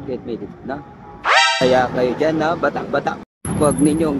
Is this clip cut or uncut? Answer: cut